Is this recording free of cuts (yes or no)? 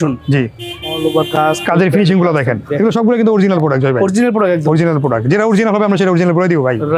yes